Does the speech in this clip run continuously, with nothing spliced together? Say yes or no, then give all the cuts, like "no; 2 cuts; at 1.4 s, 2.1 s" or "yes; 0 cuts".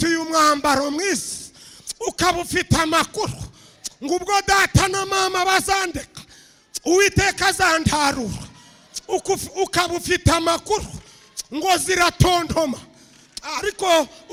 yes; 0 cuts